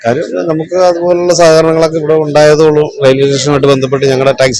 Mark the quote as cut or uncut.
uncut